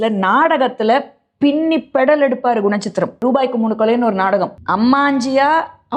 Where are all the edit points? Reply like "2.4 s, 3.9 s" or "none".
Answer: 3.2 s, 4.6 s